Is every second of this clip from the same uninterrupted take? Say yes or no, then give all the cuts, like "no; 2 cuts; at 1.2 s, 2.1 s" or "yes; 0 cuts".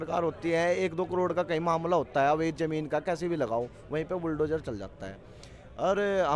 yes; 0 cuts